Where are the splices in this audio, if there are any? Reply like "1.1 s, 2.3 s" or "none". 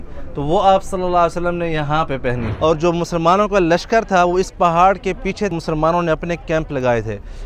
2.5 s, 5.5 s